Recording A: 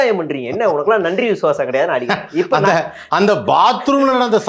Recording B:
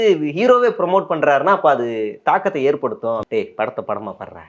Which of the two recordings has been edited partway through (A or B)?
B